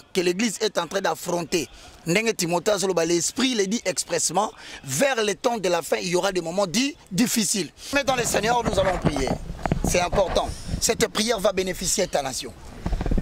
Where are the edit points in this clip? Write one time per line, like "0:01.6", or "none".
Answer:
0:07.9